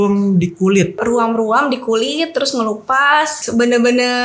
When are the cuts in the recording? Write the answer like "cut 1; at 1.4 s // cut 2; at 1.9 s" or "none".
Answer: cut 1; at 1.0 s // cut 2; at 3.4 s